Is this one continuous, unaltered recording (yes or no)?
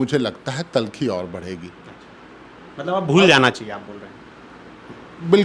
yes